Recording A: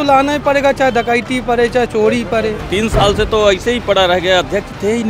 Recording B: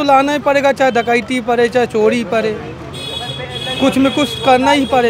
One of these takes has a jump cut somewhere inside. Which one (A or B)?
A